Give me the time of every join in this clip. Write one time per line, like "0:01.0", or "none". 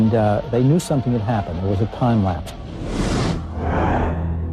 0:01.3